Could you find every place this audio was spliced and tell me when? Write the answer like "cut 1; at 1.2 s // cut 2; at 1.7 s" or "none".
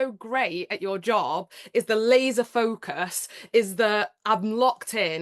none